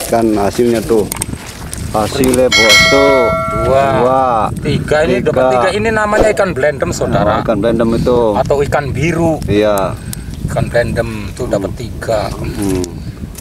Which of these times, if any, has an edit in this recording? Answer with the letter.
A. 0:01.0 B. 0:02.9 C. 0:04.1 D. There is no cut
B